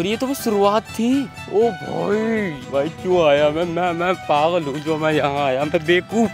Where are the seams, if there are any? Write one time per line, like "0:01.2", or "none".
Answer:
0:01.4
0:02.6